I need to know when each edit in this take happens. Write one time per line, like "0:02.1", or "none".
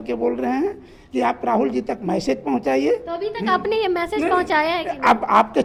none